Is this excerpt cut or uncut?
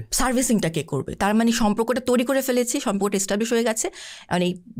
uncut